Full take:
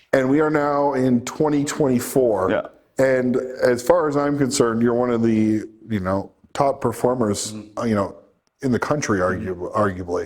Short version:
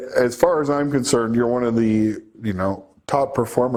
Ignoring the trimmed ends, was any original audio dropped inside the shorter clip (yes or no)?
no